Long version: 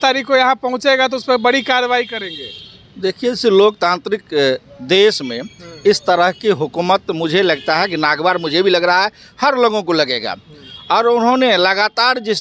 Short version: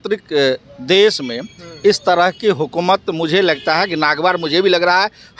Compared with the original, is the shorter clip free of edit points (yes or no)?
yes